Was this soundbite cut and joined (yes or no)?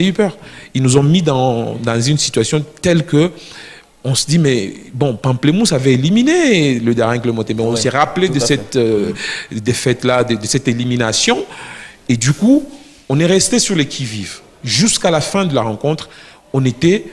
no